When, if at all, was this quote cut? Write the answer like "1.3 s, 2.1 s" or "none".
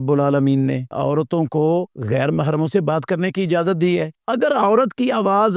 0.9 s, 2.0 s, 4.2 s